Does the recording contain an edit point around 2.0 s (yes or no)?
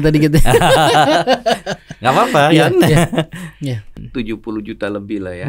no